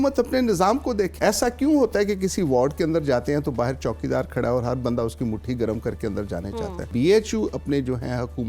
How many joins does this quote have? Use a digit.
2